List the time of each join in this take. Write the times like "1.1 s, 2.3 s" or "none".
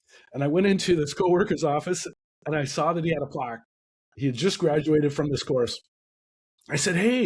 none